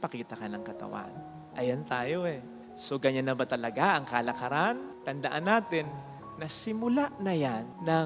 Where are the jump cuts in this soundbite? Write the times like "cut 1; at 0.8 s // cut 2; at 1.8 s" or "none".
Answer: none